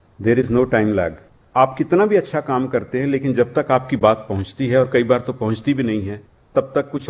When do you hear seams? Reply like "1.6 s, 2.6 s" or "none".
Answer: 1.4 s